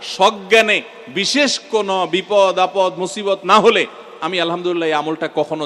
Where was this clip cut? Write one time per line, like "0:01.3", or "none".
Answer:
none